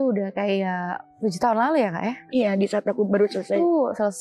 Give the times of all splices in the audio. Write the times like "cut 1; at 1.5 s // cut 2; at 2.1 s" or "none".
none